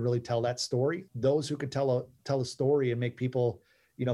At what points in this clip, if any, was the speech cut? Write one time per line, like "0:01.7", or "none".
none